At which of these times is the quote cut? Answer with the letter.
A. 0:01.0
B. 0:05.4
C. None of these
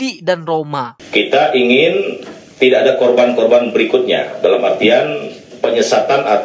A